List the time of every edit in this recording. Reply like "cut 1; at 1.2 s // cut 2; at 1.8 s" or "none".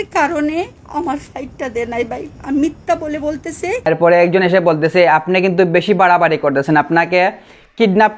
cut 1; at 3.9 s